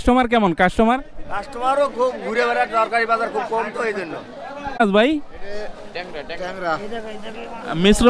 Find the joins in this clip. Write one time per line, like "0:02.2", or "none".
0:04.8